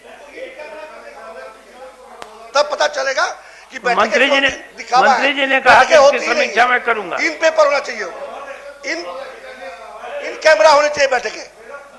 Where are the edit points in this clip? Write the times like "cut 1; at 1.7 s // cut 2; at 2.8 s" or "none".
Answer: none